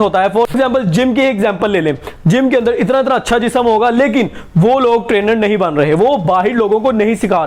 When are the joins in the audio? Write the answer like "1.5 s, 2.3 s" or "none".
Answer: none